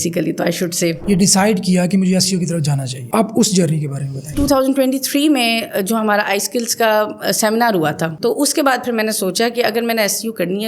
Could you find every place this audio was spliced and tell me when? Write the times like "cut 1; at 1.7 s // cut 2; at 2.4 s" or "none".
cut 1; at 1.0 s // cut 2; at 3.0 s // cut 3; at 4.3 s // cut 4; at 8.1 s